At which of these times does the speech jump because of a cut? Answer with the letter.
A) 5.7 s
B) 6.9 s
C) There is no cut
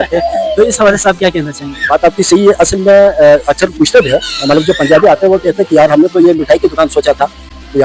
C